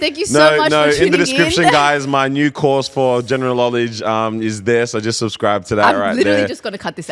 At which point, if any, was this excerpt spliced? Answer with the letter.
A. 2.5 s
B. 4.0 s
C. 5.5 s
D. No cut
D